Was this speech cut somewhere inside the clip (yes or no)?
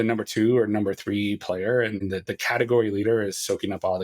yes